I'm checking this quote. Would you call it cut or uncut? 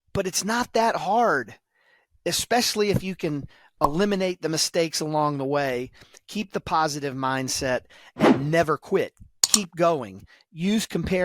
uncut